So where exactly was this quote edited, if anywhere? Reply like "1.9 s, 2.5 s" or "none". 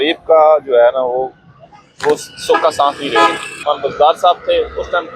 3.5 s